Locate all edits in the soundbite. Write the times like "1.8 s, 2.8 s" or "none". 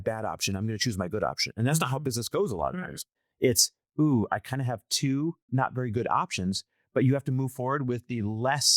none